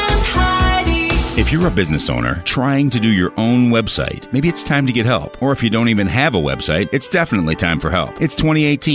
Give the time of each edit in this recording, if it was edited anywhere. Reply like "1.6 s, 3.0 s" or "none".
1.2 s